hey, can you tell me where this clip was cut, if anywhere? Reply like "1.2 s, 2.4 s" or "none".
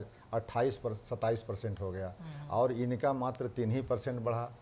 none